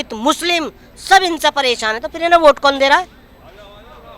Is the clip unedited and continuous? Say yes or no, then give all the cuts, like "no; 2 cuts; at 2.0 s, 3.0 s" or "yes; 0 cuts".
yes; 0 cuts